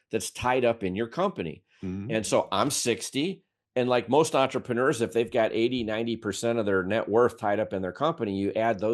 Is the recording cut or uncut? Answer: uncut